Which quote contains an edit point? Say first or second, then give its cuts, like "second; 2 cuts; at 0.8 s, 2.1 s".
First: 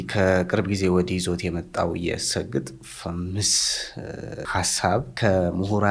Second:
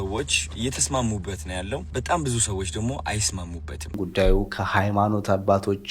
second; 2 cuts; at 1.9 s, 4.0 s